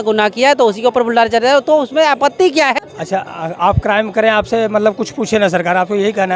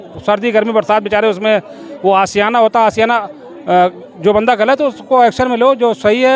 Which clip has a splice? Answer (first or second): first